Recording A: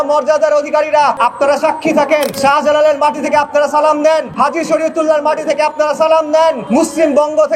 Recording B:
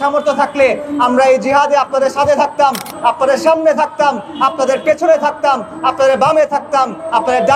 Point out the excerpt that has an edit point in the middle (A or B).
A